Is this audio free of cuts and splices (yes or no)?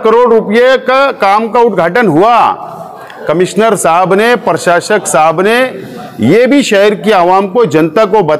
yes